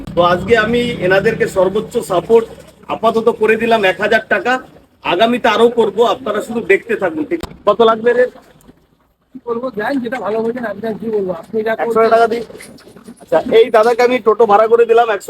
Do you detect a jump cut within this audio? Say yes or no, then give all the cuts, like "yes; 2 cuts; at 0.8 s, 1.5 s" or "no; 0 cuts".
yes; 1 cut; at 7.3 s